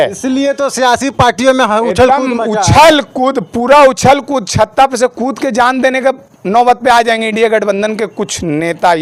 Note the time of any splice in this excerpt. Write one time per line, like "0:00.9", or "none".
none